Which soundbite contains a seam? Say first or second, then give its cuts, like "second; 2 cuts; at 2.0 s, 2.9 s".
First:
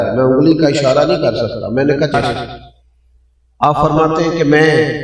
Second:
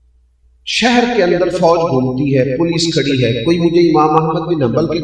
first; 1 cut; at 2.1 s